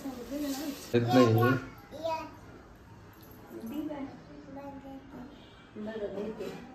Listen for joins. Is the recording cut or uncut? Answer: cut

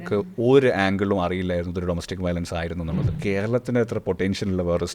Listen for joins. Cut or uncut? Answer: cut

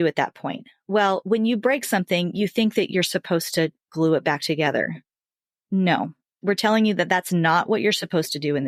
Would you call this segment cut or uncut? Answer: uncut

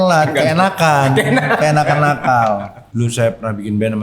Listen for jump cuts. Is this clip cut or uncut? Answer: cut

